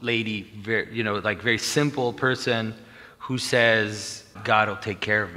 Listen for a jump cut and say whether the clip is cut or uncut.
cut